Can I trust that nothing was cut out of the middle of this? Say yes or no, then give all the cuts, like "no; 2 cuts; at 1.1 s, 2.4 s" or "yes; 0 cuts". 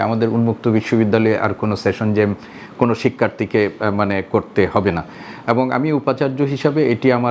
yes; 0 cuts